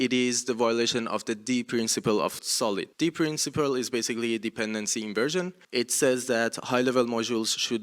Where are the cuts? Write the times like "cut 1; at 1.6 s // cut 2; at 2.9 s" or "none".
cut 1; at 2.5 s // cut 2; at 5.6 s